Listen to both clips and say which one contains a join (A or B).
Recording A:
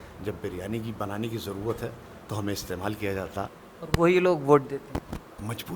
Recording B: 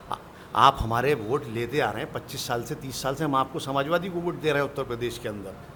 A